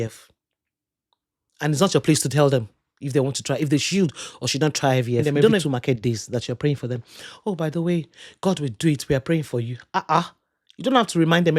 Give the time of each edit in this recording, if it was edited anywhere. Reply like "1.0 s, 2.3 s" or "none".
5.6 s